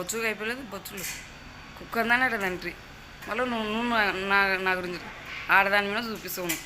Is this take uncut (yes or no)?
no